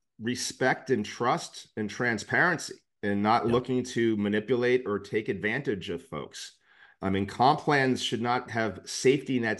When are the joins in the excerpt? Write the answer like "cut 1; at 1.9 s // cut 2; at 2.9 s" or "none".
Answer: cut 1; at 8.5 s